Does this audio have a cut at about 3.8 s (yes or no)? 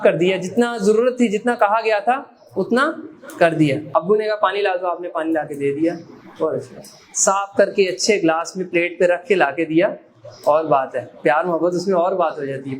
yes